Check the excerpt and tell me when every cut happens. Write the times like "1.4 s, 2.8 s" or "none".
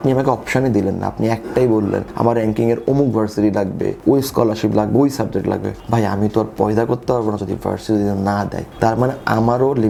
none